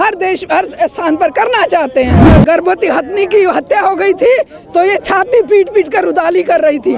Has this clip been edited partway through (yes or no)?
yes